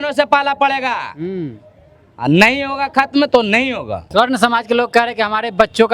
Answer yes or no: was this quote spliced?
yes